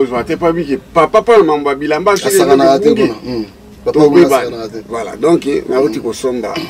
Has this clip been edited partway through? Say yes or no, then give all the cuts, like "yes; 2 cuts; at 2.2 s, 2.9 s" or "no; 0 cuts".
no; 0 cuts